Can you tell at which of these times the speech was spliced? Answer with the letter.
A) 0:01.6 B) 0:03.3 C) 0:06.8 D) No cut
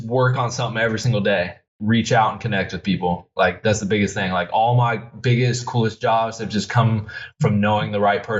A